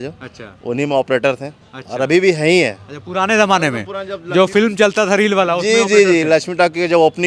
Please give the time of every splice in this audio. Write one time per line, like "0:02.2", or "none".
none

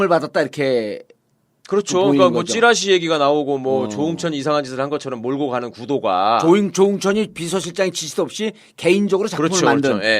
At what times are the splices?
0:02.8

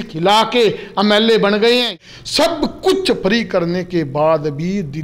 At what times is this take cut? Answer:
0:01.6

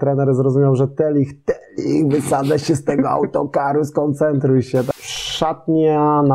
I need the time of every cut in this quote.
0:04.9

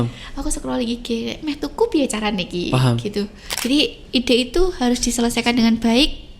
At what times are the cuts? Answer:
0:03.4

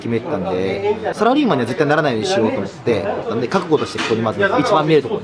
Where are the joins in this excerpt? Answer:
0:01.1
0:03.3

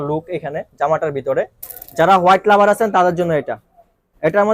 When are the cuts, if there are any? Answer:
0:01.8

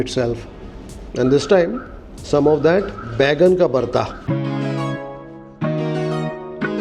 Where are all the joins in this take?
0:01.1

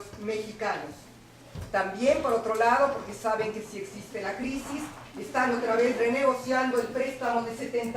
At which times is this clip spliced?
0:01.0

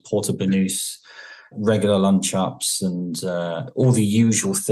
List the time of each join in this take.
0:01.5

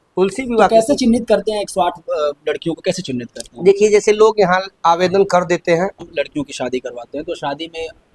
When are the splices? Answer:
0:06.0

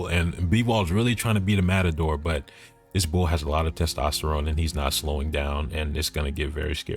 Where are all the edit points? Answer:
none

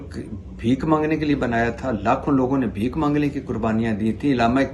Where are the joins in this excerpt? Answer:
none

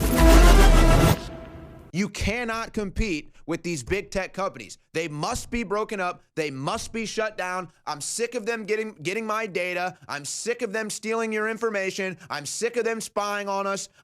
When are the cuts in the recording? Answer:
0:01.8

